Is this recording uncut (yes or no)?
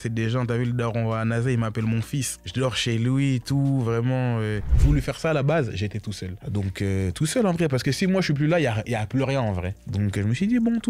no